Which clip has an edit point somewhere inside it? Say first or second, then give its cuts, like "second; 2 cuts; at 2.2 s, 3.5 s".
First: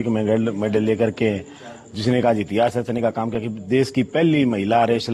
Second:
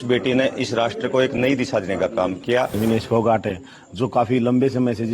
second; 1 cut; at 2.8 s